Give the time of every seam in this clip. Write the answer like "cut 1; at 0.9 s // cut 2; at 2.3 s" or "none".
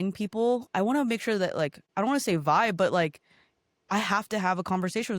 cut 1; at 1.8 s